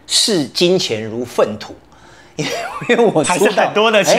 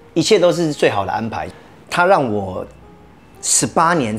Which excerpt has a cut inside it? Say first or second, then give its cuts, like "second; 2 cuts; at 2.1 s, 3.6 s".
second; 1 cut; at 1.4 s